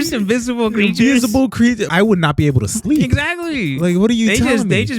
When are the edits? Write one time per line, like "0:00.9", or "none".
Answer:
0:01.8